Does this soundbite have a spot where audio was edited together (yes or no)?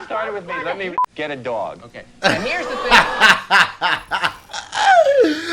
yes